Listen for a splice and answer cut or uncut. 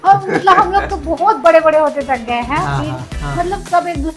cut